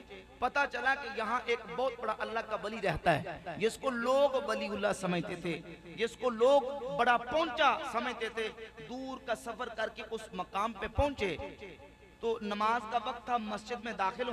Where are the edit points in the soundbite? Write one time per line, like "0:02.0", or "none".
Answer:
none